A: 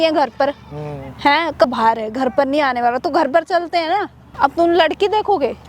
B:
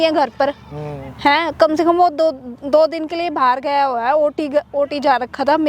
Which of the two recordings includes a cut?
A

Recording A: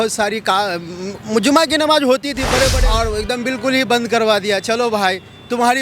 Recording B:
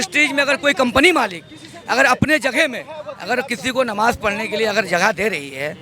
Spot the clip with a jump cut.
A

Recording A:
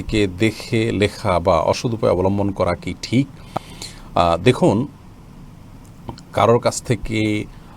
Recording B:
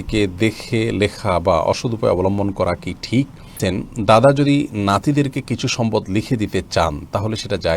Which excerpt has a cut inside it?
B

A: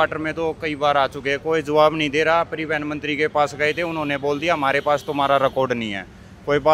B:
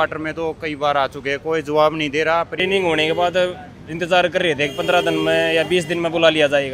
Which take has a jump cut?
B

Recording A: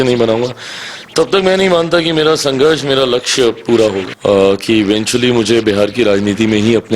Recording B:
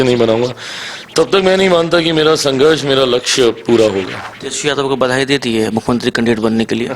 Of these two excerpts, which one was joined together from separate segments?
A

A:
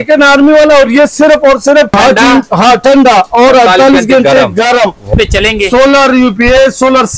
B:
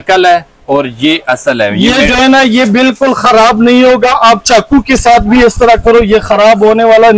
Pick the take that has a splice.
A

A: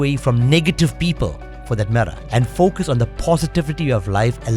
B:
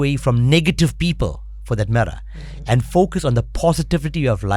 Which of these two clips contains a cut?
A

